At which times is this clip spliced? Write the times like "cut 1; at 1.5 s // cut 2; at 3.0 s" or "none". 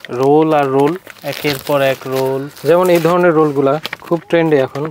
none

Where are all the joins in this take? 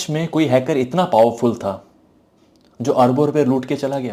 none

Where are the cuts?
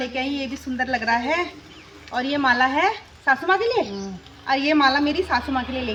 none

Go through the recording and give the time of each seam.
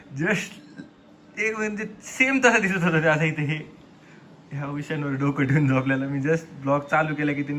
none

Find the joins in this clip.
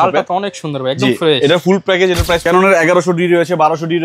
cut 1; at 2.4 s

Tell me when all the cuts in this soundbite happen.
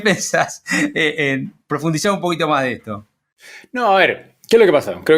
none

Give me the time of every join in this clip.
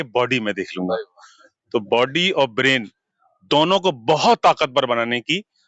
none

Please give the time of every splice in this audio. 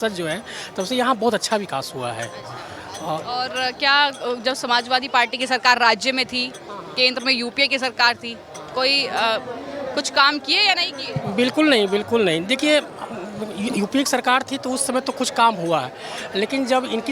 none

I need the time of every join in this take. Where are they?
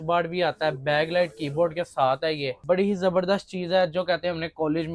cut 1; at 2.6 s

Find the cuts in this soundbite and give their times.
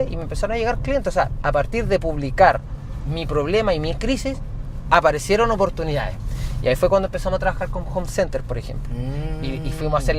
none

